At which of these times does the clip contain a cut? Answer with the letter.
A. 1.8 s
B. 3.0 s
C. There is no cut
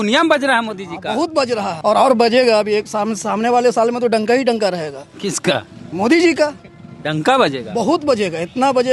A